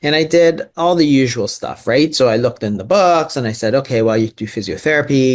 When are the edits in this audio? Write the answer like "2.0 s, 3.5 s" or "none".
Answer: none